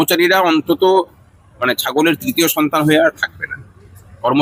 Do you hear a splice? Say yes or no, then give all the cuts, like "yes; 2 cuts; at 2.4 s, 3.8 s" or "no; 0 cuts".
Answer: no; 0 cuts